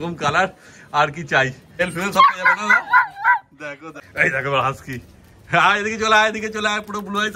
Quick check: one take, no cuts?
no; 2 cuts; at 1.8 s, 4.0 s

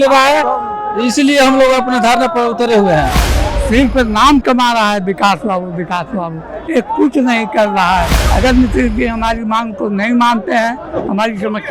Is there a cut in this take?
yes; 2 cuts; at 3.2 s, 8.1 s

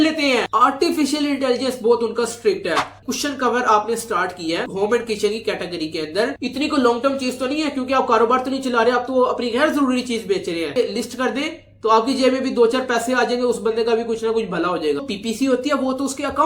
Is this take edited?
yes; 4 cuts; at 3.0 s, 6.4 s, 10.7 s, 15.0 s

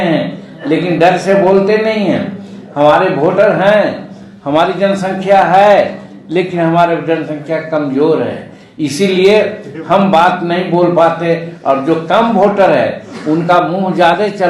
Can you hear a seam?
no; 0 cuts

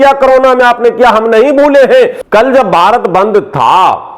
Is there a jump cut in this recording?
yes; 1 cut; at 2.2 s

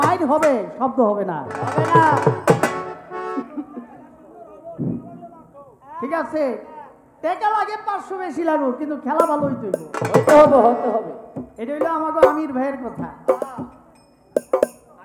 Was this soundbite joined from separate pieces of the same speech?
no; 0 cuts

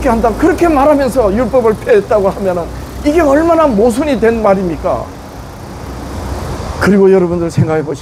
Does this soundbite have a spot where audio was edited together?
yes; 1 cut; at 6.6 s

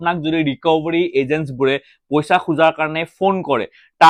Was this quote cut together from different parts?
no; 0 cuts

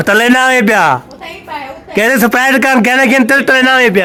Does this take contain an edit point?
no; 0 cuts

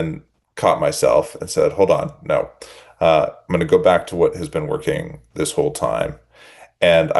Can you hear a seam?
no; 0 cuts

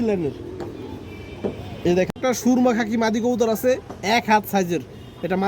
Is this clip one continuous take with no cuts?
no; 1 cut; at 2.1 s

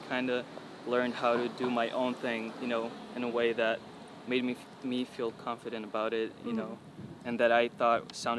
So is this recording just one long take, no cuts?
yes; 0 cuts

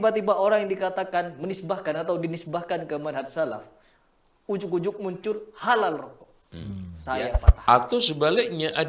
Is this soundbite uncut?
no; 1 cut; at 7.5 s

